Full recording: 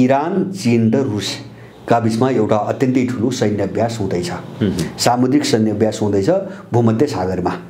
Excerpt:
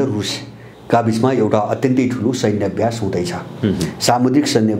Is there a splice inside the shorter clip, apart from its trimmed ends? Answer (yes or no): no